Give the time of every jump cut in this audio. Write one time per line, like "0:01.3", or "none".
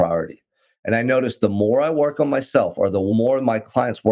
0:03.0

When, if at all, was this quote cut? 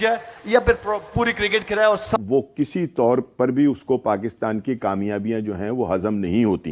0:02.2

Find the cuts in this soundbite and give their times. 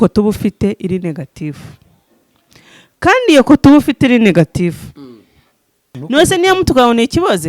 0:06.0

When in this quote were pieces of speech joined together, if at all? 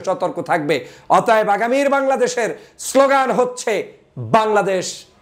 none

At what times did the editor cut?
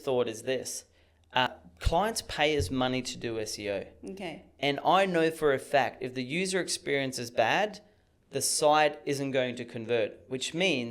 0:01.5

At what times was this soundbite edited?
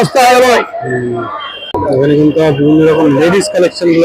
0:01.8

